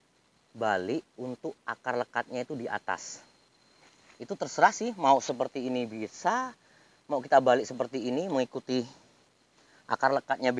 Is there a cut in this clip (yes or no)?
no